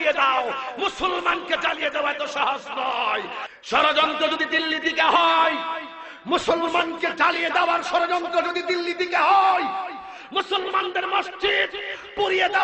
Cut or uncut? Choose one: cut